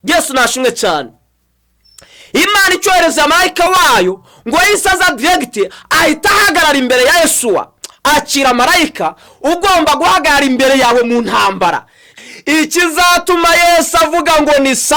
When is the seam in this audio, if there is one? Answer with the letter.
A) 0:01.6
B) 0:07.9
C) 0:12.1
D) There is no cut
C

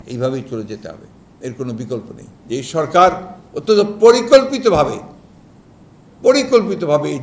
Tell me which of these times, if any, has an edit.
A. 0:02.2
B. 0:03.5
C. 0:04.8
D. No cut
A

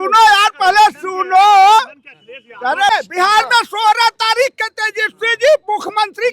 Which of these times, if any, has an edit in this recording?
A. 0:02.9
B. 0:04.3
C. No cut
A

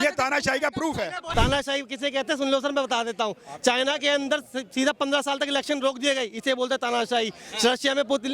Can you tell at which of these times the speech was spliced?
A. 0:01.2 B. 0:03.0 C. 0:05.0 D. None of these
A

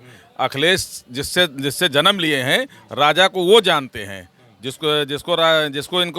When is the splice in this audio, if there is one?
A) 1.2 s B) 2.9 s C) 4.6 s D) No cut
D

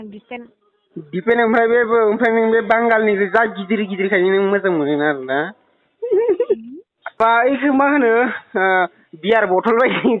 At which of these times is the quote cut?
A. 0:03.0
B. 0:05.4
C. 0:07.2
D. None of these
C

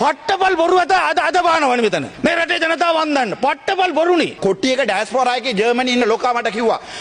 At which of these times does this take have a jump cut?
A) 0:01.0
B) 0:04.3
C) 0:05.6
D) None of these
B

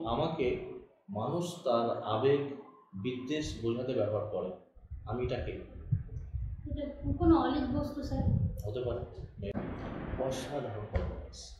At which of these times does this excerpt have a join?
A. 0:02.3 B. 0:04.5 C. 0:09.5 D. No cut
C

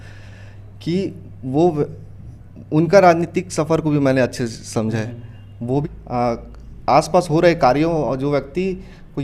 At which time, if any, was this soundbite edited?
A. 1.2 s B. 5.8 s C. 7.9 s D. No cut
B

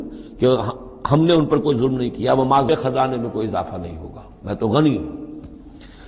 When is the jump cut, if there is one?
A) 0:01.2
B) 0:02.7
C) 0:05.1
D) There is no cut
B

